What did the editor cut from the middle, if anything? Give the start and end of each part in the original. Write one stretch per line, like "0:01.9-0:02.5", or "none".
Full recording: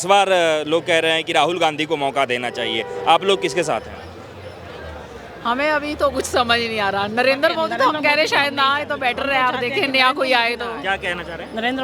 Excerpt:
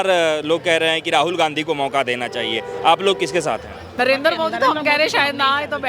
0:04.1-0:07.1